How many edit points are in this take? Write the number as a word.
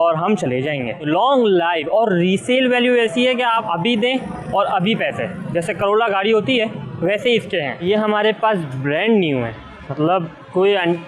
three